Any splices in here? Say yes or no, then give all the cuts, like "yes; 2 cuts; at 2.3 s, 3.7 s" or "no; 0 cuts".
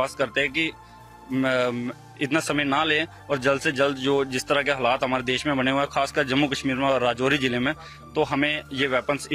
no; 0 cuts